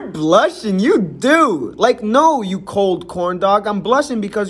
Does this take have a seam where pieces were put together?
no; 0 cuts

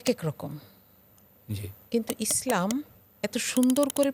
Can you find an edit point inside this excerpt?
no; 0 cuts

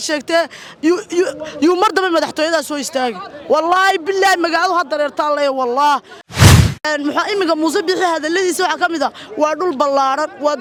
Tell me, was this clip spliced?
no; 0 cuts

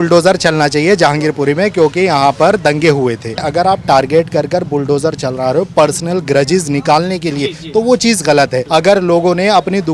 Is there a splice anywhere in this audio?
yes; 2 cuts; at 3.4 s, 8.6 s

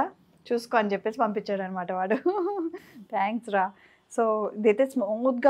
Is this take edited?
no; 0 cuts

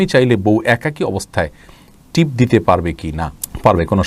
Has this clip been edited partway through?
no; 0 cuts

